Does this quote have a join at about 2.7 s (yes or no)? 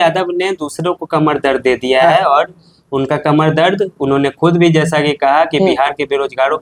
no